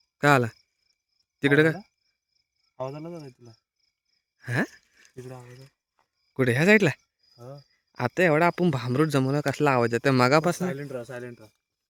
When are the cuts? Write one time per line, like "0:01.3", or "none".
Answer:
none